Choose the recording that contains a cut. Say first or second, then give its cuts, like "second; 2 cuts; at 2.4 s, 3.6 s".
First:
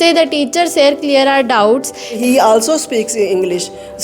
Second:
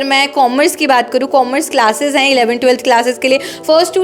first; 1 cut; at 2.2 s